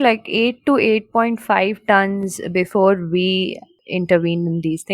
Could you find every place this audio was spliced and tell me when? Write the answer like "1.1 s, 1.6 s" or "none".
3.7 s